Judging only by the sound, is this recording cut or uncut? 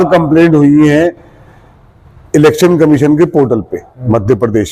uncut